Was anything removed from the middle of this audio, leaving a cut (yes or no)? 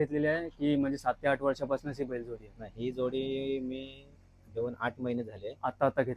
no